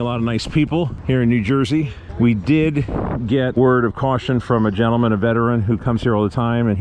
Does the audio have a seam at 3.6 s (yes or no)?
yes